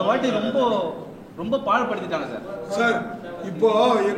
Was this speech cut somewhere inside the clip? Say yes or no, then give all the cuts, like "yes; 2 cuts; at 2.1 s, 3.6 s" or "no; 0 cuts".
no; 0 cuts